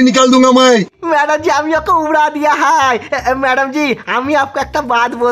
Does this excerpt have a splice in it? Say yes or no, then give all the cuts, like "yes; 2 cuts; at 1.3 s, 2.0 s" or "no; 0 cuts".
yes; 1 cut; at 0.9 s